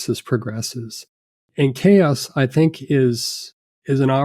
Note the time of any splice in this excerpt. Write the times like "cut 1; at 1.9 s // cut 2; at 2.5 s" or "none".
cut 1; at 1.4 s